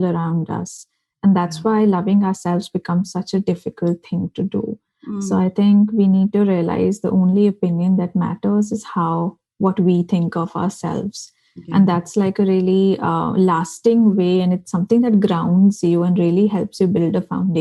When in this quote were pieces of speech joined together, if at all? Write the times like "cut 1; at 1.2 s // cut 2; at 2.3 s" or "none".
none